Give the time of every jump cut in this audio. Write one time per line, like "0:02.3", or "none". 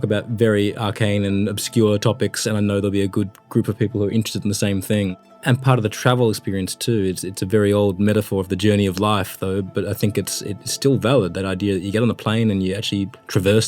0:05.3